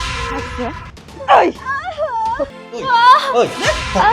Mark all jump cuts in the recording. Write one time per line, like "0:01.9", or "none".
0:02.6